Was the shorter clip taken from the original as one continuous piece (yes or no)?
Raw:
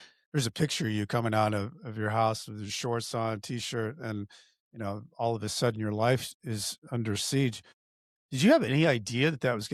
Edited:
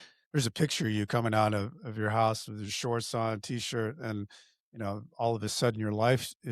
yes